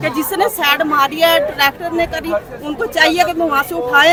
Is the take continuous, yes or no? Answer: yes